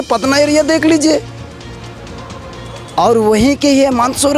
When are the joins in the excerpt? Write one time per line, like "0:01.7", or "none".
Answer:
none